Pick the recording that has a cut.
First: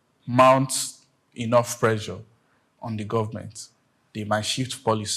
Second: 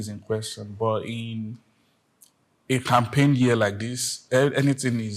second; 1 cut; at 4.2 s

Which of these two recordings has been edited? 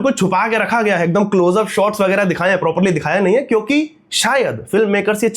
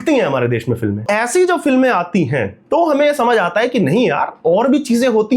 second; 1 cut; at 1.0 s

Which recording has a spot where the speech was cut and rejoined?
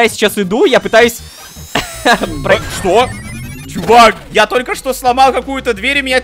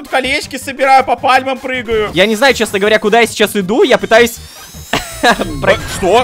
second; 1 cut; at 2.1 s

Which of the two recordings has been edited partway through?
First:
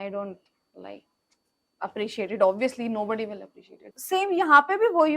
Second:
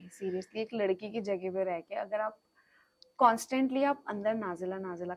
first; 1 cut; at 3.9 s

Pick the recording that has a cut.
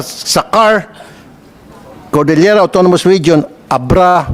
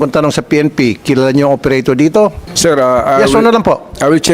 second; 1 cut; at 2.5 s

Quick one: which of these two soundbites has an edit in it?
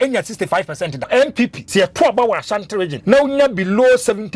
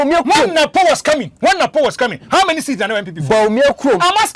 first; 3 cuts; at 1.0 s, 1.6 s, 2.9 s

